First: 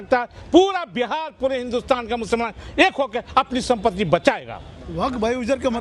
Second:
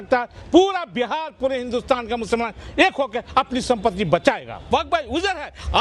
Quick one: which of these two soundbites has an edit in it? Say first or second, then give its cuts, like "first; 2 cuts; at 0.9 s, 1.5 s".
second; 1 cut; at 4.7 s